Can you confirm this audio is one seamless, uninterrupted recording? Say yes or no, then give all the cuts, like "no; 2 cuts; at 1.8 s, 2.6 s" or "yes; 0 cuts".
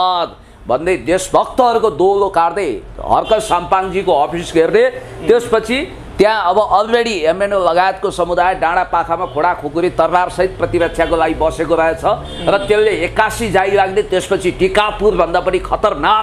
yes; 0 cuts